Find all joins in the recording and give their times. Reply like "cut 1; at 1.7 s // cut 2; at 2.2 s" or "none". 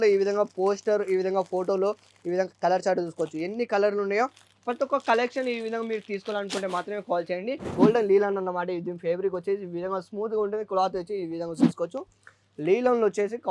cut 1; at 7.6 s